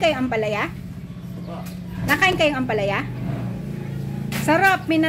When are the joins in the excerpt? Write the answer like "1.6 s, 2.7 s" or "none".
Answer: none